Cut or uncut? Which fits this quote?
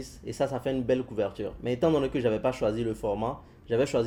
uncut